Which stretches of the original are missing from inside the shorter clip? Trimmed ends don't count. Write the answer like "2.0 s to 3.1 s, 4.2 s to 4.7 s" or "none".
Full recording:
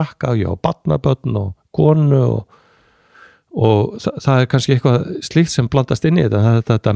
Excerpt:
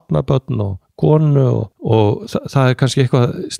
2.5 s to 3.4 s